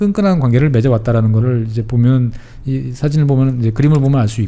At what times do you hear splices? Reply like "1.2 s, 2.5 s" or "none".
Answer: none